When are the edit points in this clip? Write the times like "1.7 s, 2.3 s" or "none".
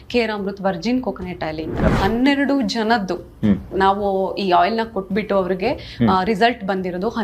1.9 s